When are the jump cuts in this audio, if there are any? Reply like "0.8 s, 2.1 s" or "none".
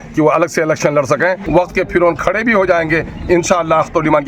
1.4 s